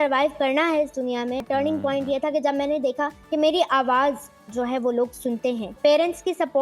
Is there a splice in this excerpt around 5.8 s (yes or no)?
yes